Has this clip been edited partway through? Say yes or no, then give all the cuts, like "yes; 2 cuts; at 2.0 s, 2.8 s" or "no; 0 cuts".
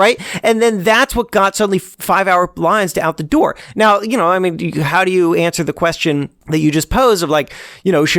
yes; 2 cuts; at 1.9 s, 6.4 s